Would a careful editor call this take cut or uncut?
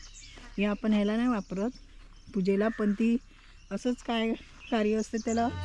uncut